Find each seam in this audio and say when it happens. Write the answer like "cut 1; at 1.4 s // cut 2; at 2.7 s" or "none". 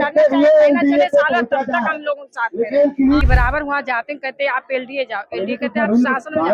cut 1; at 3.2 s

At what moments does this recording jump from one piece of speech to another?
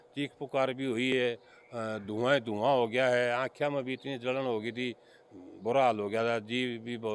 none

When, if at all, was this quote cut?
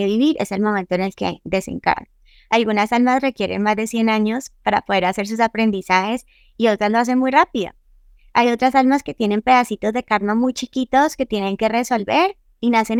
none

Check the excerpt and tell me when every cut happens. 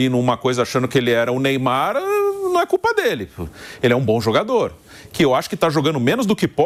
none

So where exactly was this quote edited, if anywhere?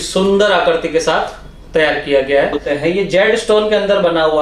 cut 1; at 2.7 s

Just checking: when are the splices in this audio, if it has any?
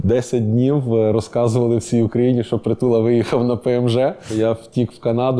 cut 1; at 4.2 s

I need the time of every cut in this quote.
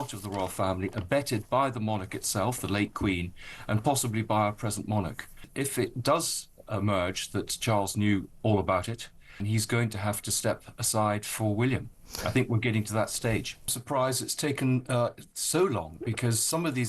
cut 1; at 5.4 s // cut 2; at 9.4 s // cut 3; at 13.8 s

